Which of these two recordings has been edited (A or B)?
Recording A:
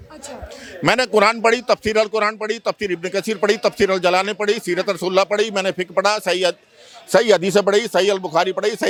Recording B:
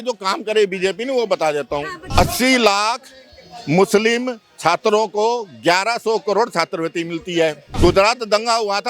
B